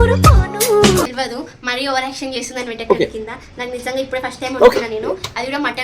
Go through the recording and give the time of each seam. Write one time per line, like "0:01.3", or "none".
0:01.0